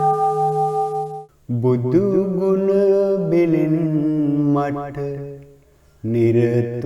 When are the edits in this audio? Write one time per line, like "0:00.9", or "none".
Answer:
0:01.1